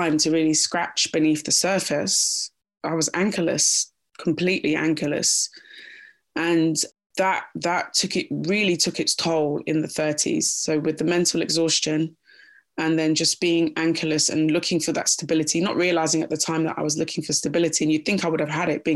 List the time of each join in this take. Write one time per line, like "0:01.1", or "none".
none